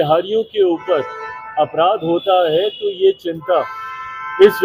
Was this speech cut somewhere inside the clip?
no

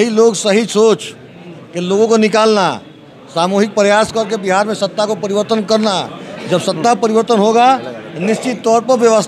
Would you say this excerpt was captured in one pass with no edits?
yes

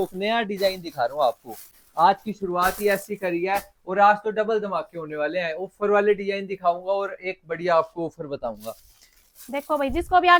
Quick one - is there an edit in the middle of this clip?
no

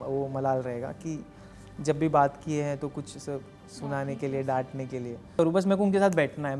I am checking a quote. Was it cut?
yes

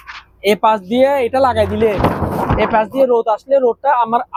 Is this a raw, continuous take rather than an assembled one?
yes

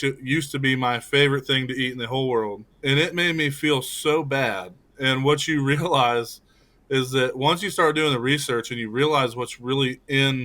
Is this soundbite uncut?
no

